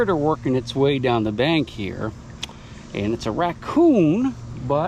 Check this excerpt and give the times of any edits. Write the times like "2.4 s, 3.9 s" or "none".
none